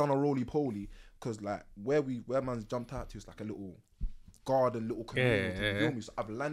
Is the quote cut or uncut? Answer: uncut